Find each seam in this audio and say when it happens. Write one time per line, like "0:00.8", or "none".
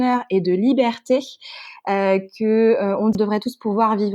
0:03.1

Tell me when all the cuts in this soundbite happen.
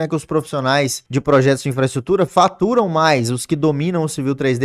0:01.0

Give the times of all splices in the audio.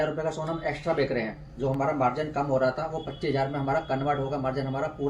none

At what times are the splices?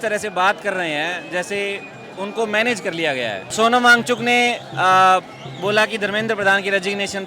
0:03.5

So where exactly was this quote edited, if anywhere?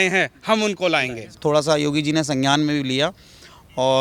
0:01.3

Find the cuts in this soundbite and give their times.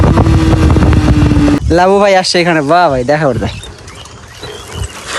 0:01.6

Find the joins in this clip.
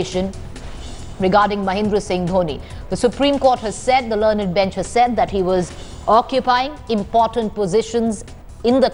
none

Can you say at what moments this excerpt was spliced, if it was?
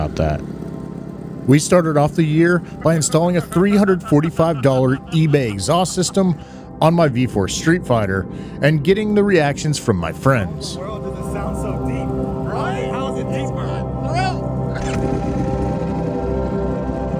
0:01.3

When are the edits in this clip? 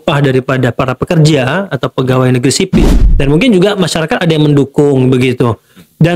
0:02.7

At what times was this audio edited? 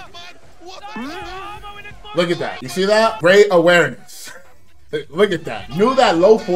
0:05.6

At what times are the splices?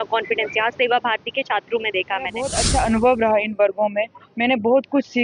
0:02.6

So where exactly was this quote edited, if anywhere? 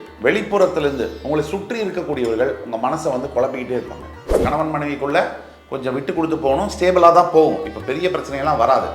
0:04.4

